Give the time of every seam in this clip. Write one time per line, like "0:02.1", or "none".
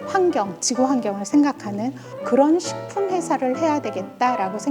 0:02.1